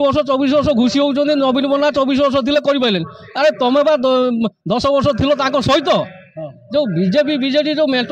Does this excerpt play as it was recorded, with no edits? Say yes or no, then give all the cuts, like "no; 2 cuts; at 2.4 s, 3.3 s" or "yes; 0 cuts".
yes; 0 cuts